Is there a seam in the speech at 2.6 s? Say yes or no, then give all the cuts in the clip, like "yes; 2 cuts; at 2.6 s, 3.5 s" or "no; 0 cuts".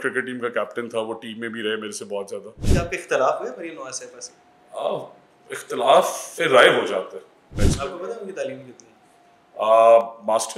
yes; 2 cuts; at 2.6 s, 7.4 s